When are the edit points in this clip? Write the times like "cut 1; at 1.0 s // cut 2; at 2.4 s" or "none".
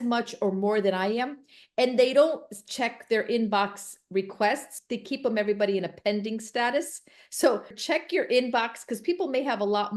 cut 1; at 4.7 s // cut 2; at 7.8 s